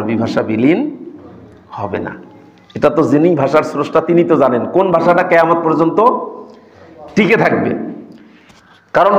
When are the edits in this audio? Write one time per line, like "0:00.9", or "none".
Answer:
none